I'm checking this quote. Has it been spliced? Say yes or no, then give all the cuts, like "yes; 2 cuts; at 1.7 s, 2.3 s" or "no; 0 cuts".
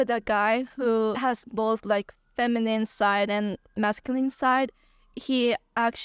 no; 0 cuts